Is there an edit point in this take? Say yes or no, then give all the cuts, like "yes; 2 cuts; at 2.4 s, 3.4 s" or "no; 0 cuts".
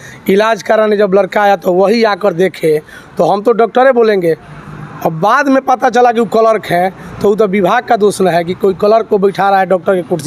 no; 0 cuts